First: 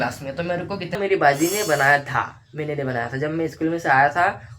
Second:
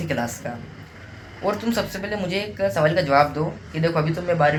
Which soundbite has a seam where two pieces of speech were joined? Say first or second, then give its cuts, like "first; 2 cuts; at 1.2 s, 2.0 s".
first; 1 cut; at 1.0 s